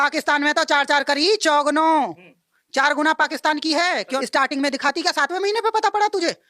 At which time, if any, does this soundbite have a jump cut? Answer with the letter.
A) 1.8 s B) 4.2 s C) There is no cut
B